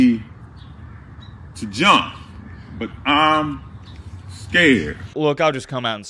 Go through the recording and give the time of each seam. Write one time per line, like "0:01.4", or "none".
0:05.0

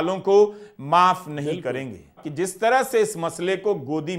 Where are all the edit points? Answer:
0:02.3

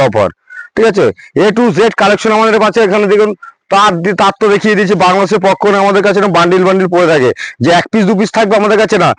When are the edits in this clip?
none

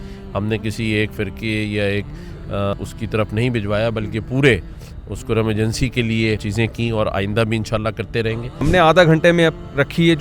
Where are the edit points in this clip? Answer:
0:02.7
0:06.5
0:08.6

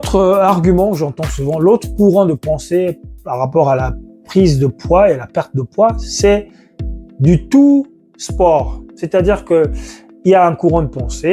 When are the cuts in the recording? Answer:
none

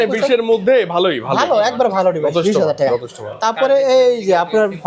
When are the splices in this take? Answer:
none

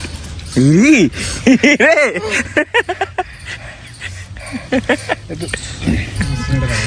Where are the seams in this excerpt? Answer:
none

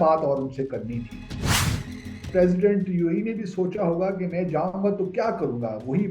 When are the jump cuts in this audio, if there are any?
0:01.7

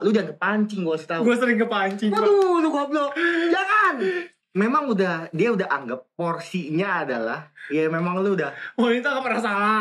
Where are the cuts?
0:04.3

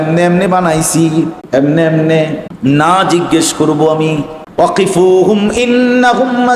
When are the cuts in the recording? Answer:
0:01.4
0:02.5
0:04.4

